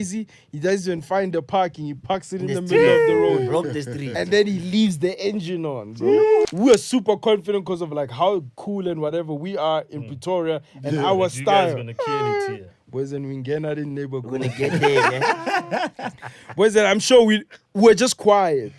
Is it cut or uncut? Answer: cut